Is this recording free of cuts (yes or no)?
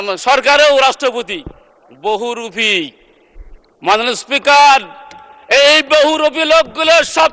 yes